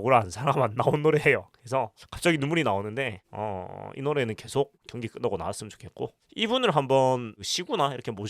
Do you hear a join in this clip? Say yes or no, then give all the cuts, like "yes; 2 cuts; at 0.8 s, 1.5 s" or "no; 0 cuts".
no; 0 cuts